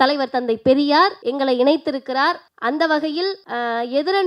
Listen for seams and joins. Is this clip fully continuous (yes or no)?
no